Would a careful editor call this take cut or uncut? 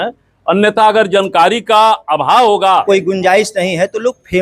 cut